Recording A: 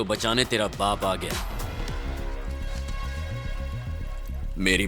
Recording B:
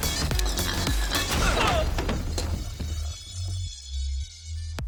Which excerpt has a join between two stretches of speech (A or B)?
A